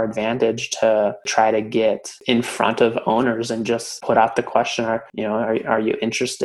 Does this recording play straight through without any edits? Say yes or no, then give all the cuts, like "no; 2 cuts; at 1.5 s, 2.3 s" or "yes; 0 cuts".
no; 4 cuts; at 1.2 s, 2.1 s, 3.9 s, 5.1 s